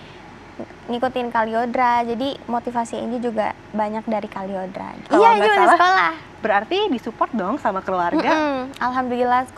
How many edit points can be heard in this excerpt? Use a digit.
1